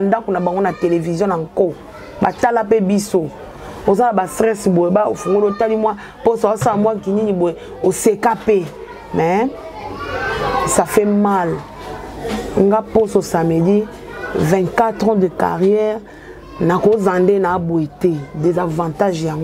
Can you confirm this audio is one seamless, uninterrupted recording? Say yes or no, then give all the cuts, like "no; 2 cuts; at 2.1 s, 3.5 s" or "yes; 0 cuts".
yes; 0 cuts